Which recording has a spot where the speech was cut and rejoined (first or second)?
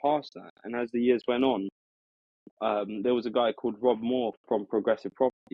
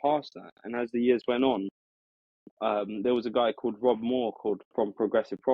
first